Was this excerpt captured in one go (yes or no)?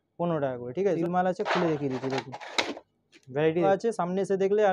no